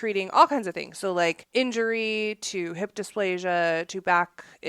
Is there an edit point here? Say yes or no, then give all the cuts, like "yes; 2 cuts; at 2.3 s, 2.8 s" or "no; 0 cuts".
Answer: yes; 1 cut; at 1.4 s